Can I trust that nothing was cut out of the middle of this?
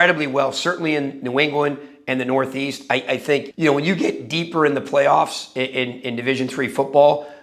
yes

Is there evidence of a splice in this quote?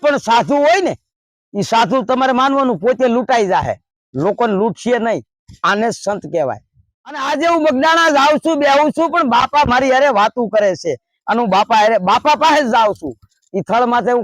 yes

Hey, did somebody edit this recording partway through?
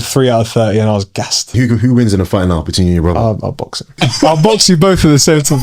yes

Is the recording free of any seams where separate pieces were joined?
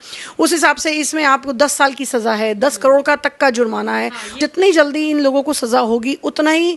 no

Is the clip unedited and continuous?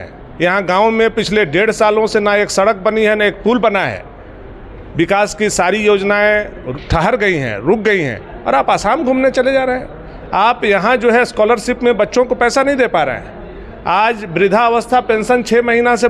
yes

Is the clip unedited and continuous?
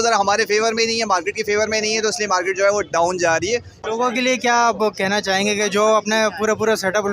no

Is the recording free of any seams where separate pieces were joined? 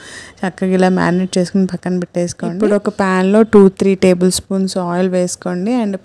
yes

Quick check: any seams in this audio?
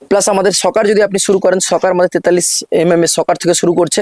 no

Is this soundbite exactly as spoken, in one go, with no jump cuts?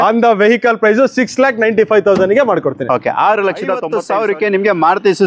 no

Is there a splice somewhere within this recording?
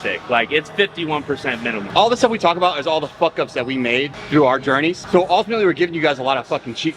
yes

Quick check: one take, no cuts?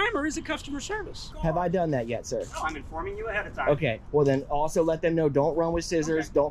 no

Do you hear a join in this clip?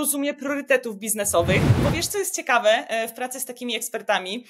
yes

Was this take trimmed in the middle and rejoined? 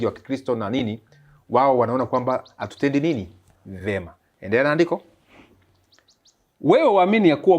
no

